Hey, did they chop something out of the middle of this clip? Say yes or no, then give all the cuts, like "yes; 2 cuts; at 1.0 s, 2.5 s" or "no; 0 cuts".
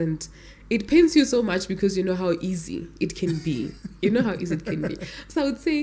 no; 0 cuts